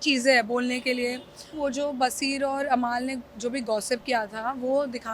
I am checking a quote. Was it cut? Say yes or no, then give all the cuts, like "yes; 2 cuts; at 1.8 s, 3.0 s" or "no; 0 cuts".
yes; 1 cut; at 1.5 s